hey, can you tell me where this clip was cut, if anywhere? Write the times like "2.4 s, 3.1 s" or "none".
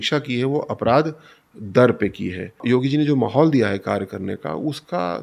2.6 s